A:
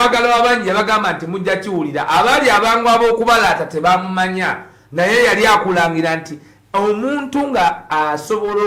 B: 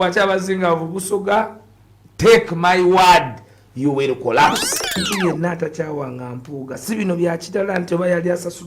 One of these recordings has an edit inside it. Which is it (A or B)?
B